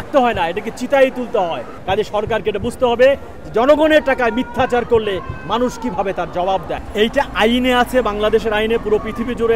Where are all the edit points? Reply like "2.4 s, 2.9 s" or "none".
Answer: 1.7 s, 6.8 s